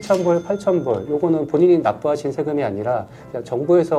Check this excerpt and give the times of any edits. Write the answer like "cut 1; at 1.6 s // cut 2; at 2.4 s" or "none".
none